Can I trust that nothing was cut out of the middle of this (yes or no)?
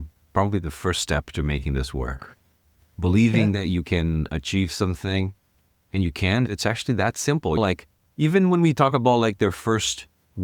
yes